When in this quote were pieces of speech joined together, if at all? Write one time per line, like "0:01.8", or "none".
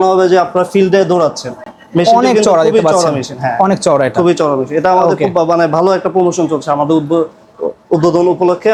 none